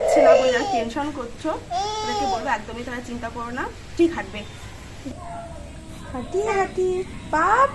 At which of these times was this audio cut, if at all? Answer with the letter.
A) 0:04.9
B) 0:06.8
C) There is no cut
A